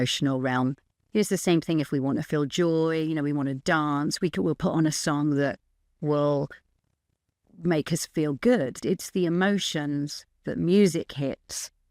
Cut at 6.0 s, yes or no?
no